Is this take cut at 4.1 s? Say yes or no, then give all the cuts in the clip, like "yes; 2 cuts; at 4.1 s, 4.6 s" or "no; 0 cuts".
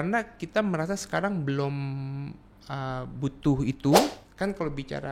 yes; 1 cut; at 4.1 s